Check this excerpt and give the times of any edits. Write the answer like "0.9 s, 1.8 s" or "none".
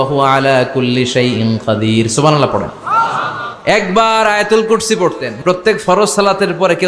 5.3 s